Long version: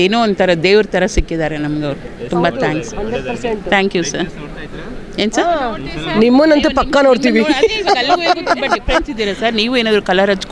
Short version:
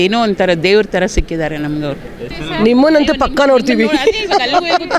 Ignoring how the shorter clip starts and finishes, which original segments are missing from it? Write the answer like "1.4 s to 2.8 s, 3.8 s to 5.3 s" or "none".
2.2 s to 5.8 s